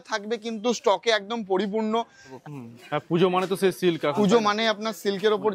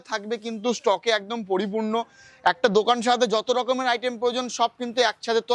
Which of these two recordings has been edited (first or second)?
first